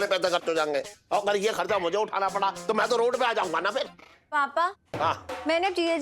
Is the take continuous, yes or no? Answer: no